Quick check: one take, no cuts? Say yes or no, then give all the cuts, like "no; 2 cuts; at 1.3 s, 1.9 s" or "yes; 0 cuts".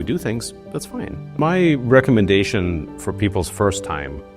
no; 1 cut; at 1.2 s